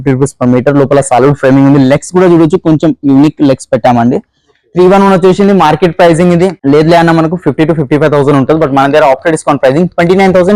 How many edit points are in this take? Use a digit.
0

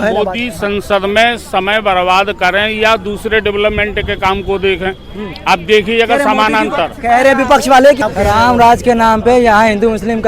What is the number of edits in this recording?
1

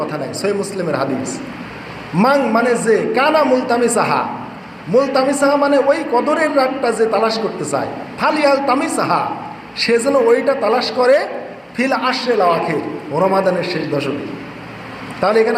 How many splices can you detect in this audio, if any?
0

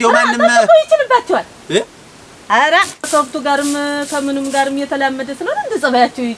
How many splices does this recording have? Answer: 1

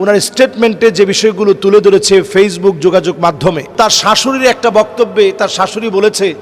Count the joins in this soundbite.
1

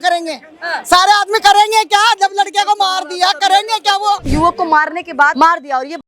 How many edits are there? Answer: 2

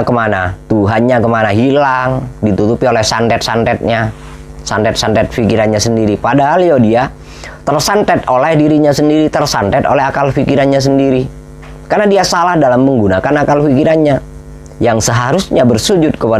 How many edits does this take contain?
0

